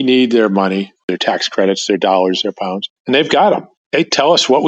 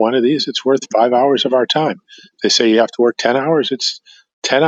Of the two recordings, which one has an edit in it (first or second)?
first